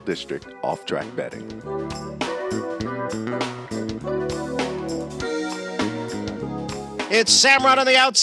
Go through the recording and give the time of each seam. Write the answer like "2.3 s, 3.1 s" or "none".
7.0 s